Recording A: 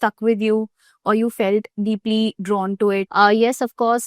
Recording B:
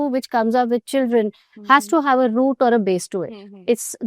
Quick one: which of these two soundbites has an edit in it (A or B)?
A